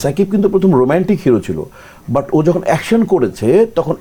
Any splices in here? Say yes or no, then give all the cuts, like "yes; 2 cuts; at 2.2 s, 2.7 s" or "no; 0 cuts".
no; 0 cuts